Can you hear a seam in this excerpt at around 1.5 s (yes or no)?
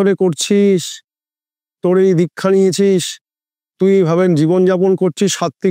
no